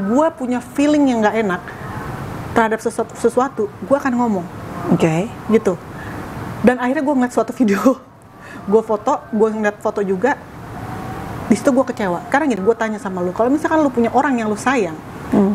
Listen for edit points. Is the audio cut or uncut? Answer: cut